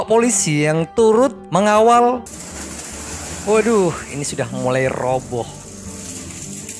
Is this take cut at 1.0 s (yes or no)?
no